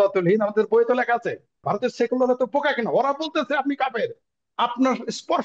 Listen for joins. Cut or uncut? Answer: cut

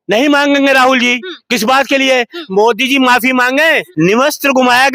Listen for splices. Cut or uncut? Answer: uncut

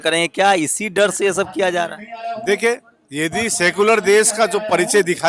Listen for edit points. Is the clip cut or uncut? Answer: uncut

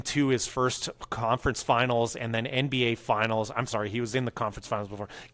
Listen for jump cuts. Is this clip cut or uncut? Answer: uncut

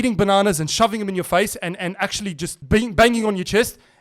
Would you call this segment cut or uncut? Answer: cut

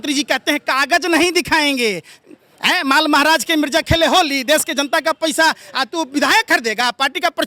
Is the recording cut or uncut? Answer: uncut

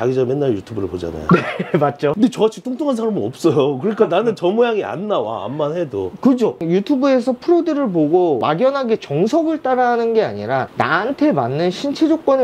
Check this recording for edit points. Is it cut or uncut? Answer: uncut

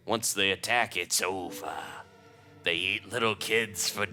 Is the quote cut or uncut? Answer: uncut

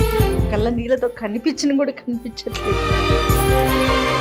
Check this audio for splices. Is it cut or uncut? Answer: uncut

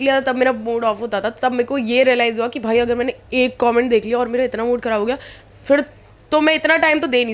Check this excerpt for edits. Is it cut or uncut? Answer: uncut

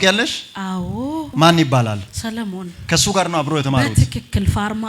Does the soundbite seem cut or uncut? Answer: cut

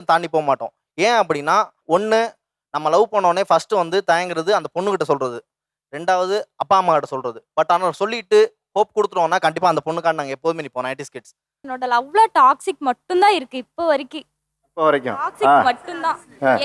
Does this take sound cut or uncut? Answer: cut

